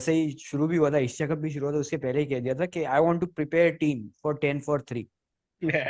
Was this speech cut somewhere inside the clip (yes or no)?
no